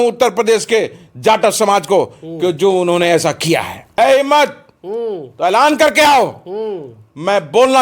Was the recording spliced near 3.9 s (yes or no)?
yes